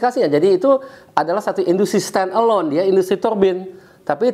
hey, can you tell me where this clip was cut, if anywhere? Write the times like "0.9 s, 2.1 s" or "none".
none